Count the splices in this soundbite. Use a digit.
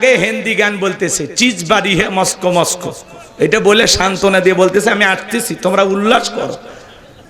0